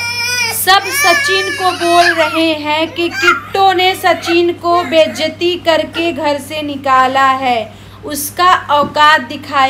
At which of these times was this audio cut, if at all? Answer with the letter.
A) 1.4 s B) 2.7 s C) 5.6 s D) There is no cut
D